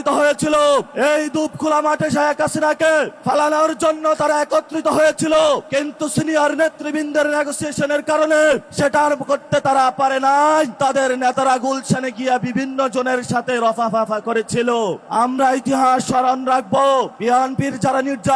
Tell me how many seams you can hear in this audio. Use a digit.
7